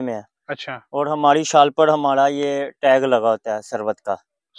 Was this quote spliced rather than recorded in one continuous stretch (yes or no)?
no